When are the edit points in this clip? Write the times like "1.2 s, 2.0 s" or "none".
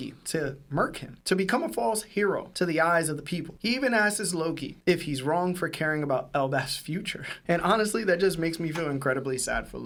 none